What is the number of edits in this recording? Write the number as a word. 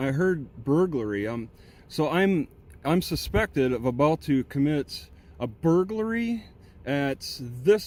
zero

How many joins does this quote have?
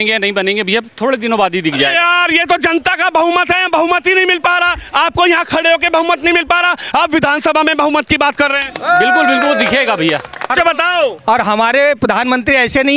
one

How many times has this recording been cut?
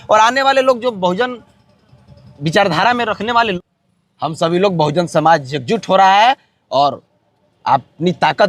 one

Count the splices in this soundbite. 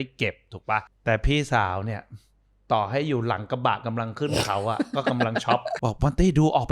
two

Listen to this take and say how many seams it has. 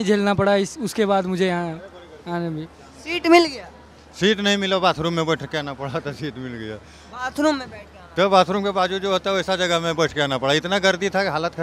zero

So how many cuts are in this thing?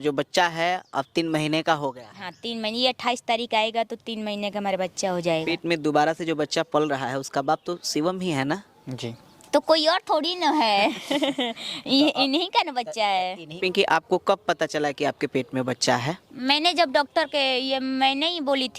two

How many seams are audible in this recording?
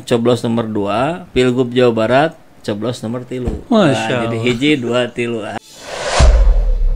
two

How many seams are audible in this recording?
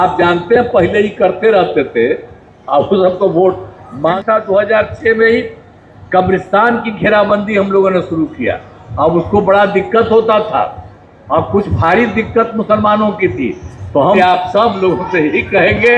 two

